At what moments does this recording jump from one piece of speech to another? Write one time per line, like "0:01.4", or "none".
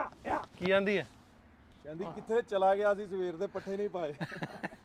none